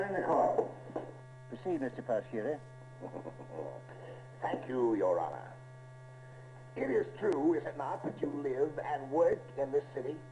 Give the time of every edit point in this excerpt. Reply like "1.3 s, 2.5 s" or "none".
5.2 s